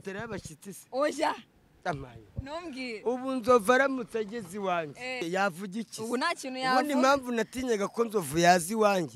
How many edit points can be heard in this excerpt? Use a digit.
1